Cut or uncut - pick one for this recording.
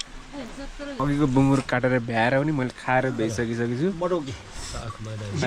cut